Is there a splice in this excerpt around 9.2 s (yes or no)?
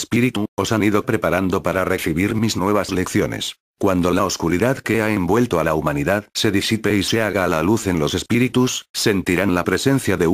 yes